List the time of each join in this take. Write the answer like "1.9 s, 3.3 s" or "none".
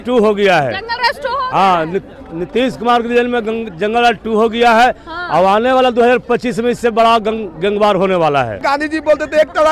8.6 s